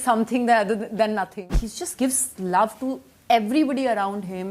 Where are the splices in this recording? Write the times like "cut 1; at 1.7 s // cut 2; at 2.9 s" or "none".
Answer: cut 1; at 1.4 s